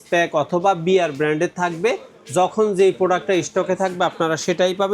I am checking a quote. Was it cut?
no; 0 cuts

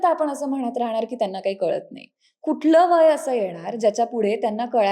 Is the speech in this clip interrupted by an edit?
no; 0 cuts

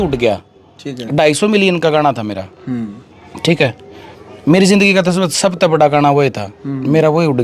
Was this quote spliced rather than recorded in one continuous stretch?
no; 0 cuts

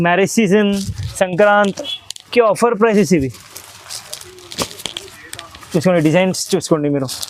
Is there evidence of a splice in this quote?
no; 0 cuts

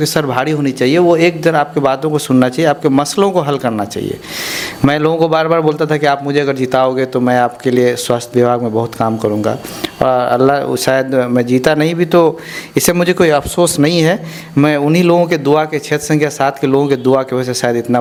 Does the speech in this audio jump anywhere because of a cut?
no; 0 cuts

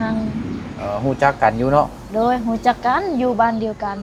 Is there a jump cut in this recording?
no; 0 cuts

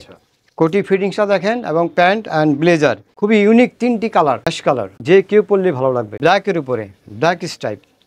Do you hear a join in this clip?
yes; 3 cuts; at 3.1 s, 5.0 s, 6.1 s

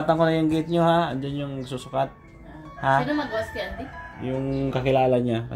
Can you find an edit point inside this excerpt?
no; 0 cuts

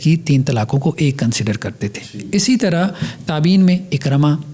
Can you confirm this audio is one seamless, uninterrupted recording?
yes; 0 cuts

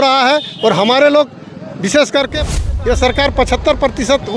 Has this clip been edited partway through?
yes; 1 cut; at 2.5 s

